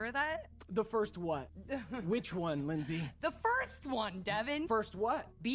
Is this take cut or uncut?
cut